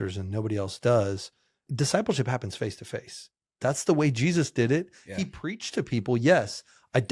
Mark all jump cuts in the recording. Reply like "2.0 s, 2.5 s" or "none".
1.6 s, 3.4 s